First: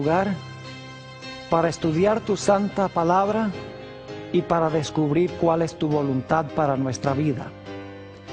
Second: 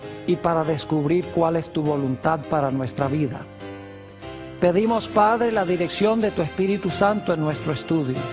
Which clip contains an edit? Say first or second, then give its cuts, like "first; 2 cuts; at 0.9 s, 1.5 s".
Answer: second; 1 cut; at 5.7 s